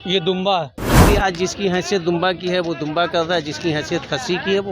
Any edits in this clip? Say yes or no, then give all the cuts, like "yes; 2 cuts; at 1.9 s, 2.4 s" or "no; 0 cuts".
yes; 1 cut; at 1.0 s